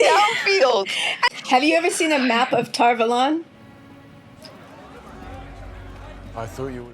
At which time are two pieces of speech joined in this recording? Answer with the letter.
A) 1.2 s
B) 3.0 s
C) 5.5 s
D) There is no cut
A